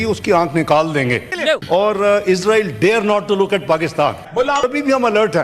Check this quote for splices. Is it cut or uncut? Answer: cut